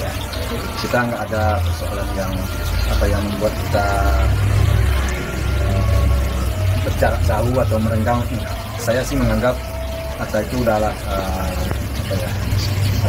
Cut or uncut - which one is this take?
uncut